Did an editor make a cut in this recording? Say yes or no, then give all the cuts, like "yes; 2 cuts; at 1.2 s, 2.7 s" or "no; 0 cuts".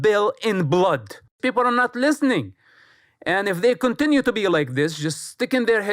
yes; 1 cut; at 1.4 s